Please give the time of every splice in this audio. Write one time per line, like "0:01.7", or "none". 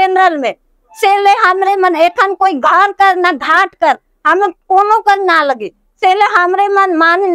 none